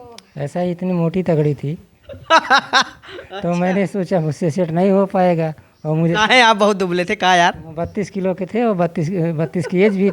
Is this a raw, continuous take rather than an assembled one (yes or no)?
yes